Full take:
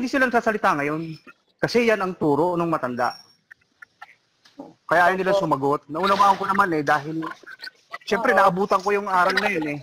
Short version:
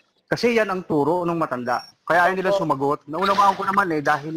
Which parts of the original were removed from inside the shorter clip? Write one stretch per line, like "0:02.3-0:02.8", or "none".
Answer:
0:03.2-0:04.7

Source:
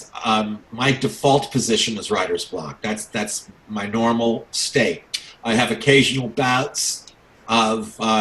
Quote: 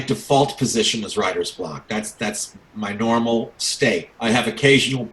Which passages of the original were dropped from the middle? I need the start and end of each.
0:05.0-0:05.3

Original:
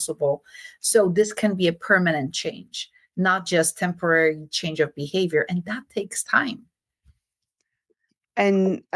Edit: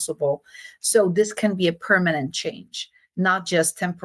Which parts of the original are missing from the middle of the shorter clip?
none

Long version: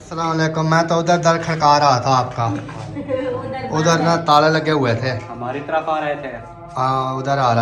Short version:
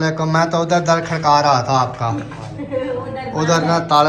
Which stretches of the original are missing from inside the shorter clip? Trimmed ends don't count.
none

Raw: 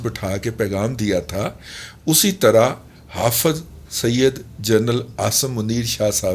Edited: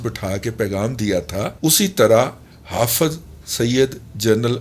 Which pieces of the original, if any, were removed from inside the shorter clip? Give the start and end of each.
0:01.5-0:02.0

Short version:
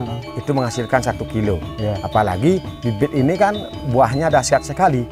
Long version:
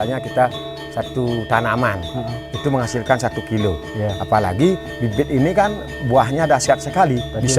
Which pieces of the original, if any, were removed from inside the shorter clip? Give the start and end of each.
none

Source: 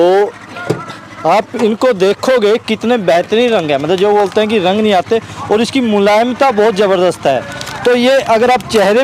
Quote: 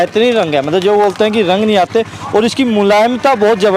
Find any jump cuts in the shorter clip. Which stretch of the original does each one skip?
none

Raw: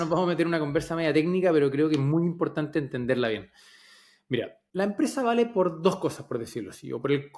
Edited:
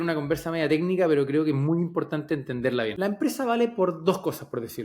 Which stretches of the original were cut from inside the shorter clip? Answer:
0:03.4-0:04.7

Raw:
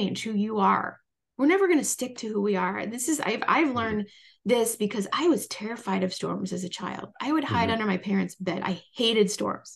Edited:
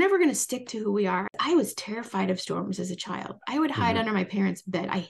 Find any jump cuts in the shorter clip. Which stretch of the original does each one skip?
0:02.8-0:05.1

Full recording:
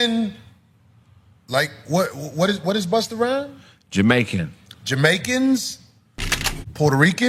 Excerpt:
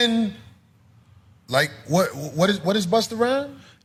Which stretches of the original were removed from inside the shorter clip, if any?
none

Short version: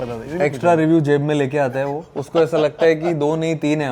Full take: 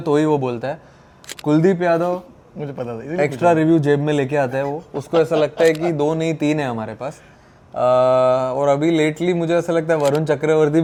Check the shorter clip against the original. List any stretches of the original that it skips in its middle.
none

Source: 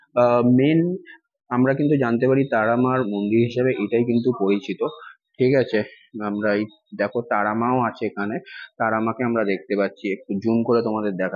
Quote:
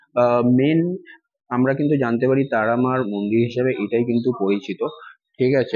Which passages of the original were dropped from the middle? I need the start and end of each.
none

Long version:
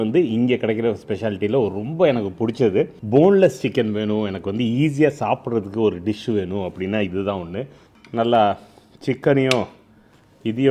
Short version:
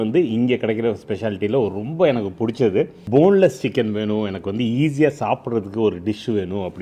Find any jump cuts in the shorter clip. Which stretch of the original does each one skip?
none

